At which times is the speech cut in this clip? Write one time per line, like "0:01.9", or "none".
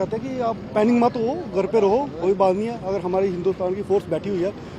none

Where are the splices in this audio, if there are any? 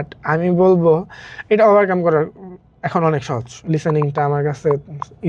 0:03.5

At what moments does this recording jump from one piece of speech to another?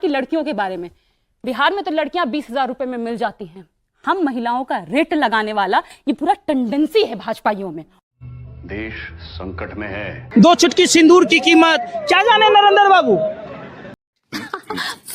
0:10.2

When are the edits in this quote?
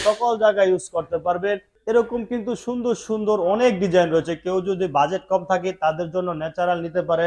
0:01.7

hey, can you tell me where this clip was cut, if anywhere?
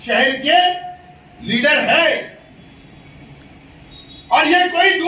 0:02.6

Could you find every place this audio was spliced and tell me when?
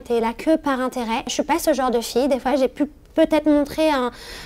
0:01.3

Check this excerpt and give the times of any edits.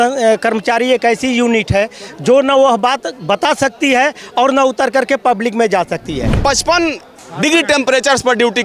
0:06.3

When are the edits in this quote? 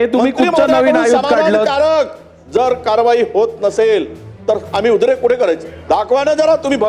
0:05.7

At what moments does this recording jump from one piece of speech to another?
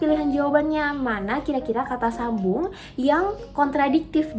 none

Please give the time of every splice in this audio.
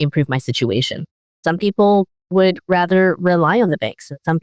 0:01.2
0:02.2

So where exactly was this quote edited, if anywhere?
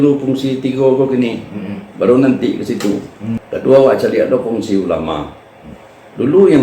0:03.4

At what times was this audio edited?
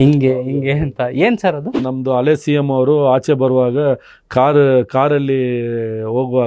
0:01.9

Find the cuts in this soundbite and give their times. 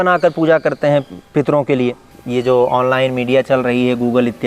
0:02.1

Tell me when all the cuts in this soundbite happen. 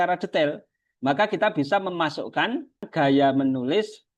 0:02.9

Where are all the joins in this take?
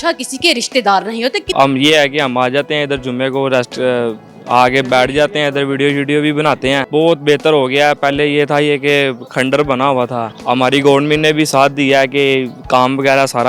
0:01.5
0:06.8
0:10.3

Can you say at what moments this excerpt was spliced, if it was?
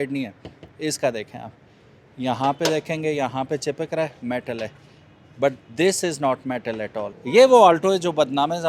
0:07.1

